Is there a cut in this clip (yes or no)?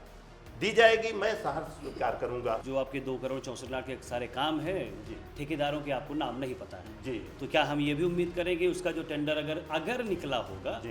yes